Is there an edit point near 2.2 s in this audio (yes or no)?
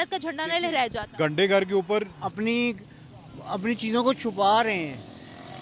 yes